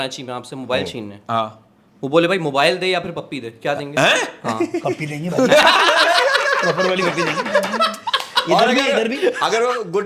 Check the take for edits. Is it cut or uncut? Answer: uncut